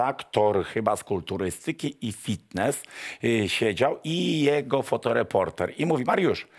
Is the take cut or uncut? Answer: uncut